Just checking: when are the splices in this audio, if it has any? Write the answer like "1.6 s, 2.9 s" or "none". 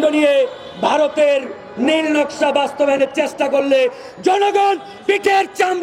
none